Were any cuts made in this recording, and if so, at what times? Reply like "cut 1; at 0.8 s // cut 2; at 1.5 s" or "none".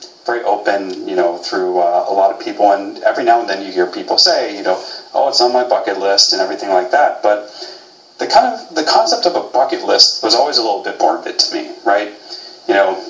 none

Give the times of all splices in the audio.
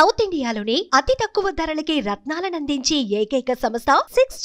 none

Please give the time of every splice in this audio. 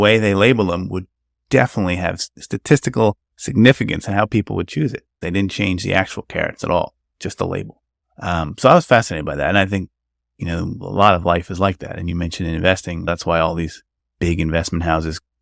cut 1; at 2.3 s // cut 2; at 5.1 s // cut 3; at 13.1 s

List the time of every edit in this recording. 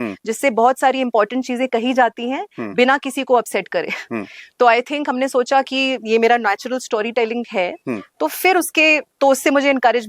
none

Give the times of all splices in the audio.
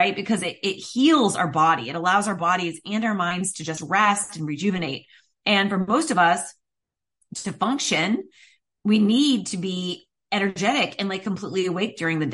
none

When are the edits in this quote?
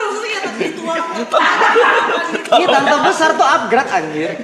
none

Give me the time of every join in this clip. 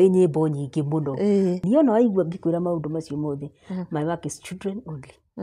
cut 1; at 1.6 s

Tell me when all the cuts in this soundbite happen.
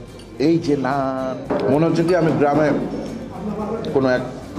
cut 1; at 1.5 s

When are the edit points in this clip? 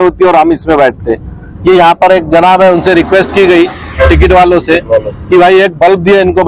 none

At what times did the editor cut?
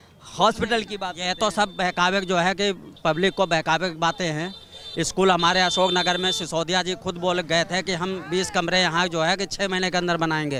none

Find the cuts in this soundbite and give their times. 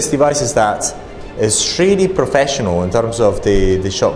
none

